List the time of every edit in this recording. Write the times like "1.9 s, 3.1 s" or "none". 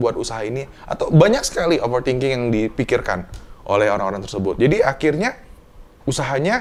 none